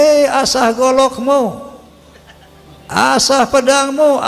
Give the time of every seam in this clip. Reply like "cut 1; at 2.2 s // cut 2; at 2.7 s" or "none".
none